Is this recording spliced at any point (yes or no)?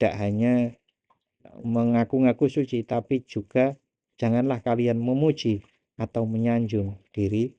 no